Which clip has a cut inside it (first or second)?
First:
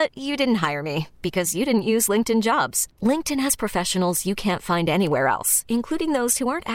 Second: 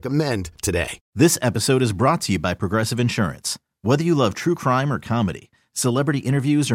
second